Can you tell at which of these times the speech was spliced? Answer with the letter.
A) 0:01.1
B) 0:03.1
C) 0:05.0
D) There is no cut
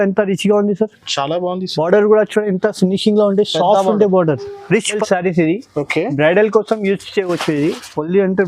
C